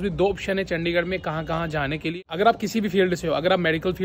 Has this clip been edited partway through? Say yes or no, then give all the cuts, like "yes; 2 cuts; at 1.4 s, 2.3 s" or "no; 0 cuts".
yes; 1 cut; at 2.1 s